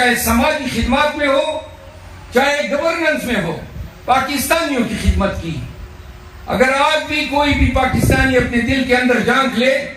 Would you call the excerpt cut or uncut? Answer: uncut